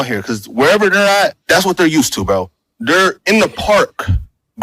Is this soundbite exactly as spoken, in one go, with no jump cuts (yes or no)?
no